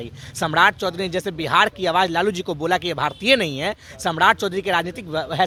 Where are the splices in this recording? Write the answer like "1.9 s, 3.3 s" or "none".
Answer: none